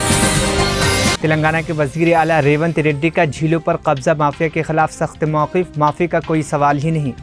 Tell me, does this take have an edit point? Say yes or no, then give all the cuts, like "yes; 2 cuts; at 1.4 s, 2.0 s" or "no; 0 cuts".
no; 0 cuts